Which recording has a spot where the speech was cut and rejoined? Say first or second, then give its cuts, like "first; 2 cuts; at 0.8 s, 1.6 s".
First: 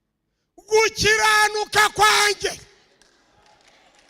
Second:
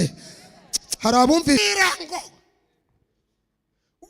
second; 1 cut; at 1.6 s